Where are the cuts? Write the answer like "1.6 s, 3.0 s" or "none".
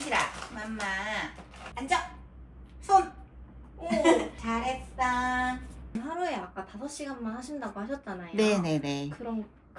1.6 s, 6.0 s